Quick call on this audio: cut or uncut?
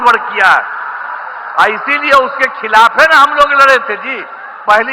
cut